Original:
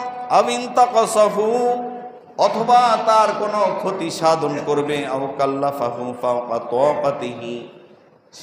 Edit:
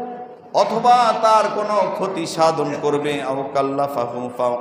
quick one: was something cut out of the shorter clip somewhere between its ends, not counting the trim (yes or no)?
no